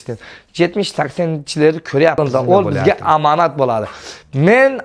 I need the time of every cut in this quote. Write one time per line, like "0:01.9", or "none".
0:02.2